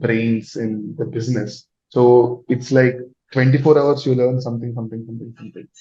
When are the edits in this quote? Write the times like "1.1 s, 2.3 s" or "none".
none